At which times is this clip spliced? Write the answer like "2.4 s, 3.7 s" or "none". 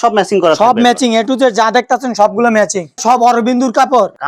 3.0 s